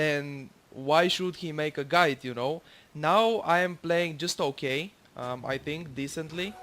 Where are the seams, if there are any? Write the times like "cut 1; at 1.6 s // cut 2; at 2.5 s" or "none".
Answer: cut 1; at 3.2 s